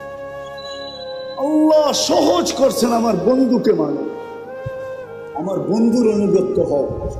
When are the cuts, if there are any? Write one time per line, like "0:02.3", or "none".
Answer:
0:04.1
0:05.3